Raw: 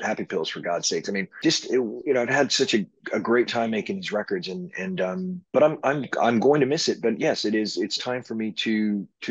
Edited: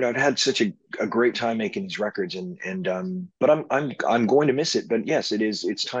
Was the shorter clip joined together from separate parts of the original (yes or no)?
no